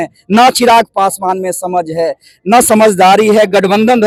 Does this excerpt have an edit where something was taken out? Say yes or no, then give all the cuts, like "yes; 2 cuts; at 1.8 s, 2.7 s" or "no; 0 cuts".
no; 0 cuts